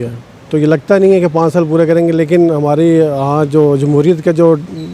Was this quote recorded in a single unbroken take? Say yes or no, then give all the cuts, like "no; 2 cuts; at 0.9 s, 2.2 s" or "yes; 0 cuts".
yes; 0 cuts